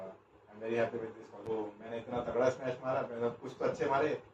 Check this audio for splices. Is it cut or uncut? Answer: cut